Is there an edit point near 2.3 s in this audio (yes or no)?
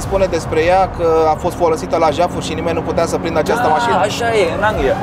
no